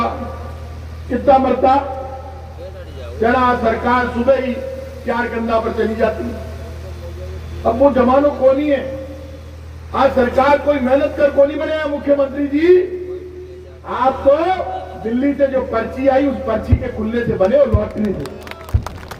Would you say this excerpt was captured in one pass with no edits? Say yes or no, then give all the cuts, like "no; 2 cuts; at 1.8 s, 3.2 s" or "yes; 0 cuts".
yes; 0 cuts